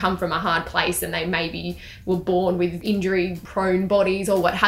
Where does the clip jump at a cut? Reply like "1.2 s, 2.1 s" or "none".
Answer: 3.1 s